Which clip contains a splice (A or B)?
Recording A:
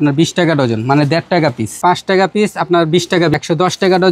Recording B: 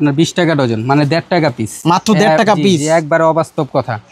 A